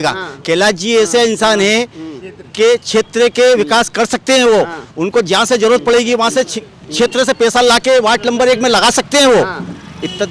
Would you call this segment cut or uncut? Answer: uncut